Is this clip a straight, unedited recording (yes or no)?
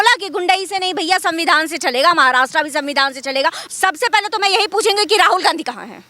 no